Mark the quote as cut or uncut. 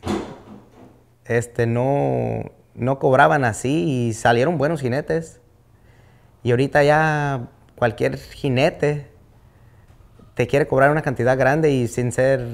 uncut